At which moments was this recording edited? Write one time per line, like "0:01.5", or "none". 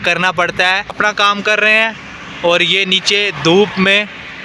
0:01.0